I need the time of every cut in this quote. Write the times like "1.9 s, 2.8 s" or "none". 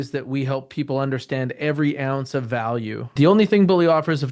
3.1 s